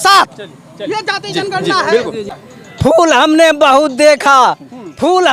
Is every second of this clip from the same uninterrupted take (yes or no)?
no